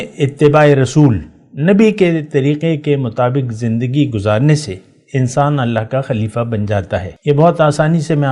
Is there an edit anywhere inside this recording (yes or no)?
yes